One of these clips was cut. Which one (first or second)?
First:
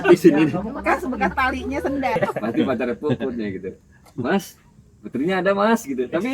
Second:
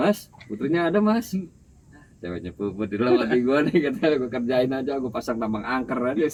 first